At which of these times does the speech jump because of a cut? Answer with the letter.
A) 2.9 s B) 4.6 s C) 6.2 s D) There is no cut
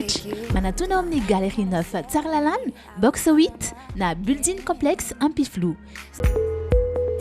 C